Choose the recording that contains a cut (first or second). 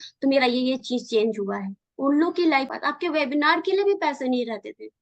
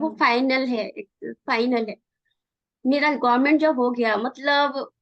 first